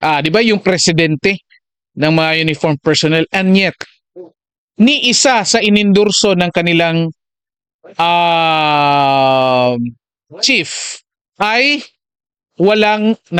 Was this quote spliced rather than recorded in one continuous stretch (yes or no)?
no